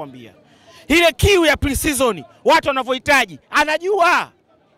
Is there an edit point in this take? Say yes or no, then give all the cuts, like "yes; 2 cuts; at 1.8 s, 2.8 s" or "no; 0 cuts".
no; 0 cuts